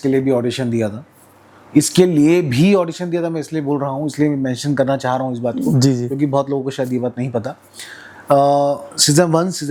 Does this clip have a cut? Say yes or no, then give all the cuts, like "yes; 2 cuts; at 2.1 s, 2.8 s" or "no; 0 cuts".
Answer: no; 0 cuts